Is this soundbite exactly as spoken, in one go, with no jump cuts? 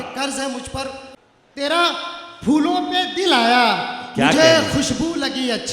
no; 1 cut; at 1.1 s

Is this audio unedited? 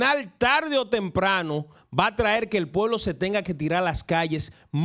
yes; 0 cuts

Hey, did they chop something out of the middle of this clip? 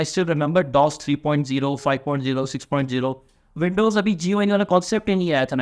no; 0 cuts

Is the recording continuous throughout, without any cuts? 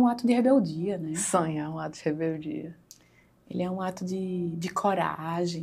yes; 0 cuts

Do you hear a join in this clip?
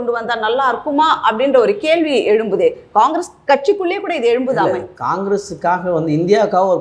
no; 0 cuts

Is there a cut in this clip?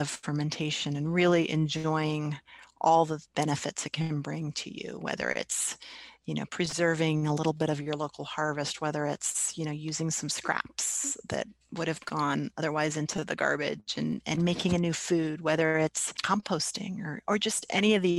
no; 0 cuts

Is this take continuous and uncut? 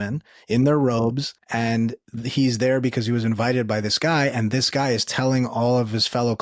no; 1 cut; at 1.7 s

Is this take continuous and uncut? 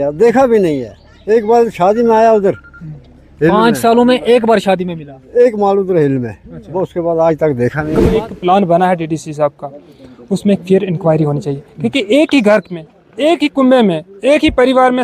no; 1 cut; at 8.1 s

